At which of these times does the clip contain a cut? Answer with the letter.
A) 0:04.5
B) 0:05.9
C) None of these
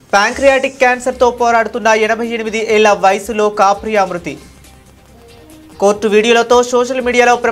C